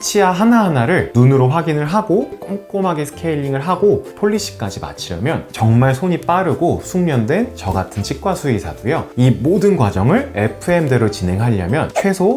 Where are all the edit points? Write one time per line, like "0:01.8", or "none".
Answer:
0:02.3
0:04.1
0:05.5